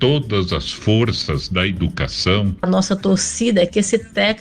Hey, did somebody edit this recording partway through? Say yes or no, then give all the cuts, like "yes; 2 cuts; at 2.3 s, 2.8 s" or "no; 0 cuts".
yes; 1 cut; at 2.6 s